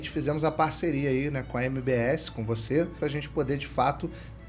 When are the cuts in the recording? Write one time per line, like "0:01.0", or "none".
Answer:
0:03.0